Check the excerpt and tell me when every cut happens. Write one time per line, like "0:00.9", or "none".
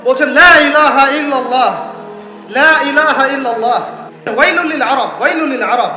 0:04.6